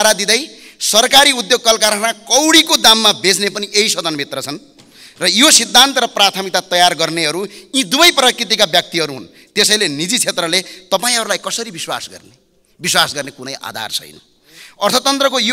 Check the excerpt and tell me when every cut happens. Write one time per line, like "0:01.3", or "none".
none